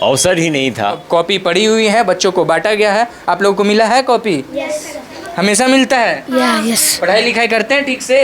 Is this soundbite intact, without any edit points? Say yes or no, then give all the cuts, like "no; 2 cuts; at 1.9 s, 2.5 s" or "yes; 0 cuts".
no; 1 cut; at 1.0 s